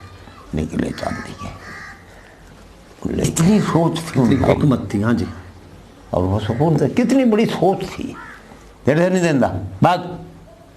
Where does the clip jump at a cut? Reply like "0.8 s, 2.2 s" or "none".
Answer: 3.3 s